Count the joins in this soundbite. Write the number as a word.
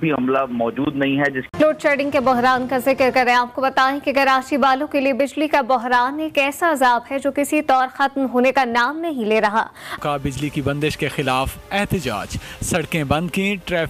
two